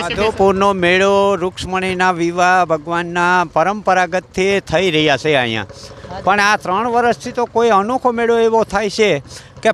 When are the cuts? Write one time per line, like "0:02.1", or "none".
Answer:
none